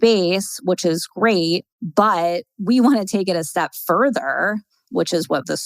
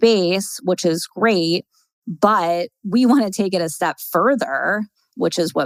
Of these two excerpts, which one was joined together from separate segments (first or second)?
first